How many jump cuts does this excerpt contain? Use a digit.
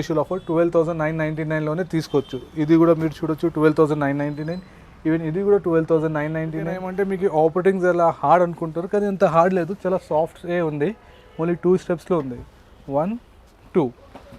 1